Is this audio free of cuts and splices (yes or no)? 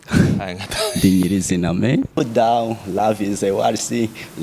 no